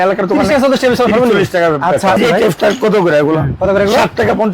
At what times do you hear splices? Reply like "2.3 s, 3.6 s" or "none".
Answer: 2.2 s